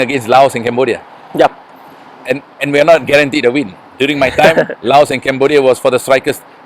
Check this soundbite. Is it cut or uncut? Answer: uncut